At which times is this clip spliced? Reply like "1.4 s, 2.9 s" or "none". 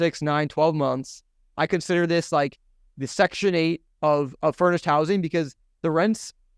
3.8 s